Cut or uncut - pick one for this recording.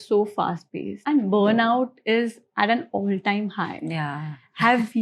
cut